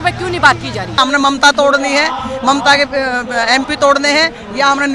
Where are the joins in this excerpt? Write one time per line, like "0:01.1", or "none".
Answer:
0:00.9